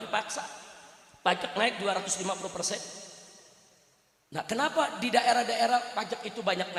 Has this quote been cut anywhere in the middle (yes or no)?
no